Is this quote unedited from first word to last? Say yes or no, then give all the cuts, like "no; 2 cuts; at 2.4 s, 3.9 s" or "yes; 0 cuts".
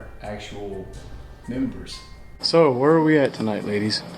no; 1 cut; at 2.3 s